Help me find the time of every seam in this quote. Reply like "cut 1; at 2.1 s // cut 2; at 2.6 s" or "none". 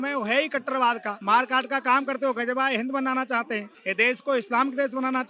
cut 1; at 1.1 s // cut 2; at 3.8 s